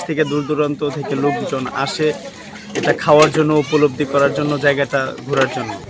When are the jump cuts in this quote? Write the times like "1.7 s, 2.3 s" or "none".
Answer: none